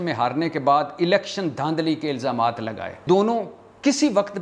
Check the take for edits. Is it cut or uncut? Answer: cut